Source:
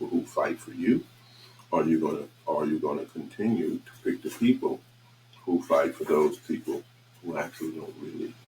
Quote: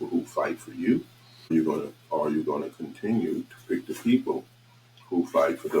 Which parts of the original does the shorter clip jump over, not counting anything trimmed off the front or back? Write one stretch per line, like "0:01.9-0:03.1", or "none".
0:01.5-0:01.8